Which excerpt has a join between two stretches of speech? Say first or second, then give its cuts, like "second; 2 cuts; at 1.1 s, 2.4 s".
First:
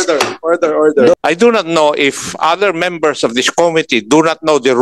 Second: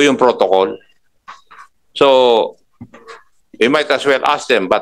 first; 1 cut; at 1.1 s